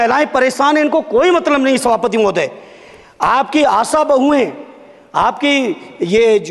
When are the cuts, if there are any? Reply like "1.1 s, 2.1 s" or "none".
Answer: none